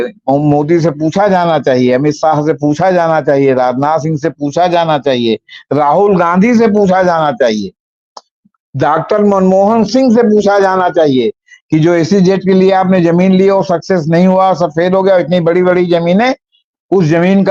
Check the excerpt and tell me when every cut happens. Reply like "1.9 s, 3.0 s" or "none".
none